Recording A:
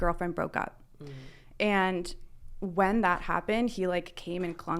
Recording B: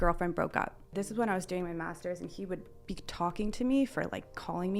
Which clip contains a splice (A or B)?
B